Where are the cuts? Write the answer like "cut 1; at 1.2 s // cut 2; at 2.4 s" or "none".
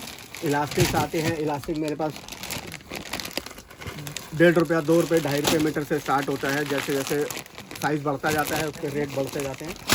none